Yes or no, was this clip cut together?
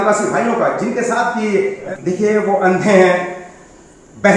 yes